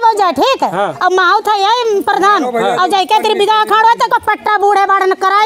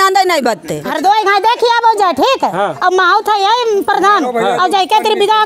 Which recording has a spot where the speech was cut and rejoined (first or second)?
second